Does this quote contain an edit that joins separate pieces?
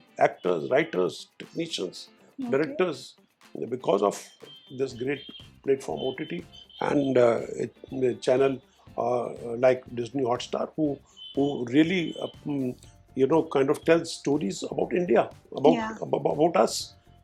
no; 0 cuts

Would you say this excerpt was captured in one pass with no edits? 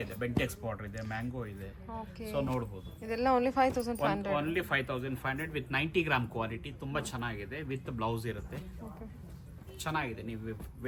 yes; 0 cuts

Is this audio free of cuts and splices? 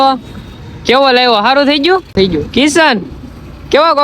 no; 1 cut; at 2.1 s

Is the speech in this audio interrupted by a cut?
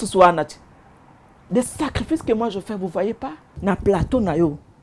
yes; 1 cut; at 3.4 s

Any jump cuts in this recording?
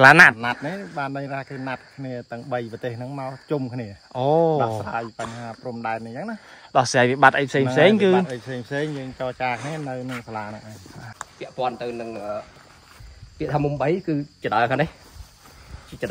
yes; 1 cut; at 11.2 s

